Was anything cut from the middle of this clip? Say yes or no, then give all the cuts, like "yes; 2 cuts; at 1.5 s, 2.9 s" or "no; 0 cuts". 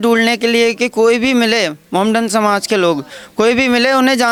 no; 0 cuts